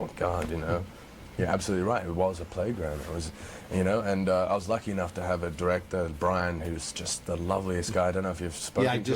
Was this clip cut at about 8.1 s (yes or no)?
yes